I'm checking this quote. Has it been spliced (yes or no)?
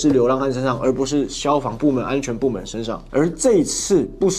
yes